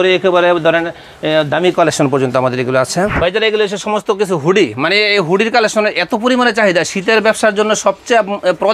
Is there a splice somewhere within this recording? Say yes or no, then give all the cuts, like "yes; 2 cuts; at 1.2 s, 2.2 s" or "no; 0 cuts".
yes; 1 cut; at 3.1 s